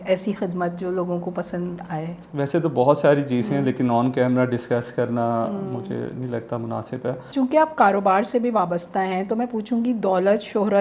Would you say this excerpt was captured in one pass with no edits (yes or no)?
no